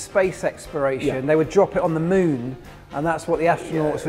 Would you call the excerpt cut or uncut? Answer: uncut